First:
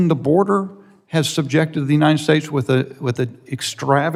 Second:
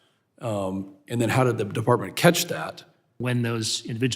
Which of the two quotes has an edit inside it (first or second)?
second